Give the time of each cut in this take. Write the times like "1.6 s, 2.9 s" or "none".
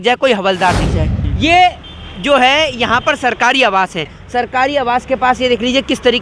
1.2 s